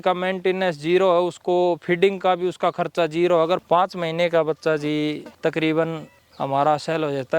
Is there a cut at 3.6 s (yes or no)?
yes